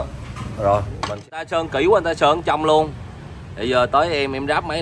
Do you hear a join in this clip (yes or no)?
yes